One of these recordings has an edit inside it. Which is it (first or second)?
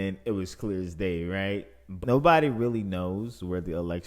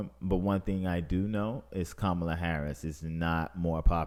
first